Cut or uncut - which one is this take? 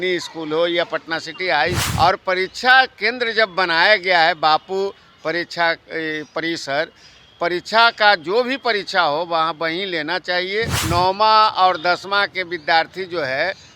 cut